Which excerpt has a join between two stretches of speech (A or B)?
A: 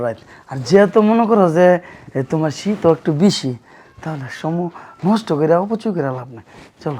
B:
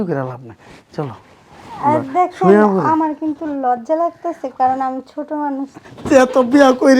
B